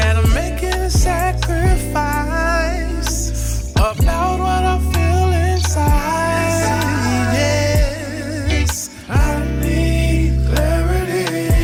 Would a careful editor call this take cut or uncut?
uncut